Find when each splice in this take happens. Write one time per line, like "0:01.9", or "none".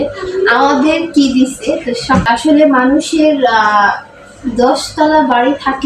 0:02.2